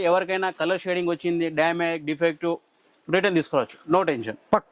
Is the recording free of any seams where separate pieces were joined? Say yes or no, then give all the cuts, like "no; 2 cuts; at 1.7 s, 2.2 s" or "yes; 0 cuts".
yes; 0 cuts